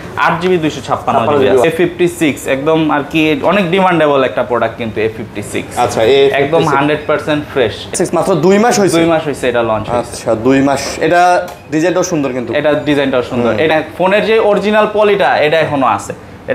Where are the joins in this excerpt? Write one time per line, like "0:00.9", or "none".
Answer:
0:01.6
0:07.9
0:13.7